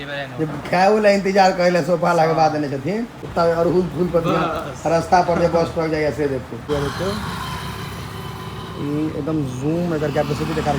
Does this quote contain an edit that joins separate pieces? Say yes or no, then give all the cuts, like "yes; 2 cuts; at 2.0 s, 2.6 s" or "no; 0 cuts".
yes; 2 cuts; at 3.3 s, 6.6 s